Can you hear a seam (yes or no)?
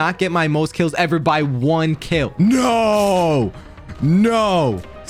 no